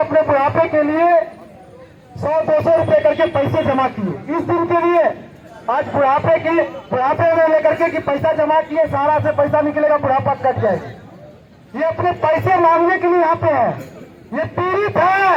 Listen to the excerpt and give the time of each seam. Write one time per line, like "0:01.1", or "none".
none